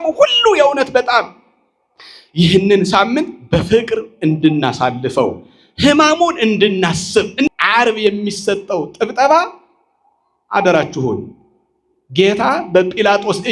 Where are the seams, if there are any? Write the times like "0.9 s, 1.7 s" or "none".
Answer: 7.5 s